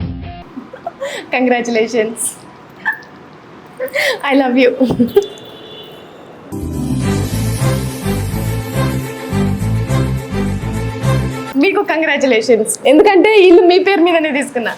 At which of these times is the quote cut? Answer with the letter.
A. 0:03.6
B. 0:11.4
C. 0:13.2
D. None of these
B